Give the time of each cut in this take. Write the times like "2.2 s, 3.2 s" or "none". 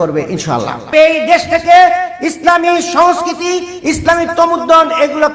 0.9 s